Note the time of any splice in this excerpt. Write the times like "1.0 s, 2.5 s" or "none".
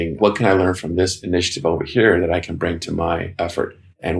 3.3 s